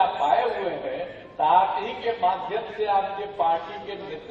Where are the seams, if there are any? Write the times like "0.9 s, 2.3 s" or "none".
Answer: none